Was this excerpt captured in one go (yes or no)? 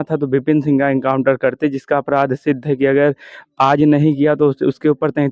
yes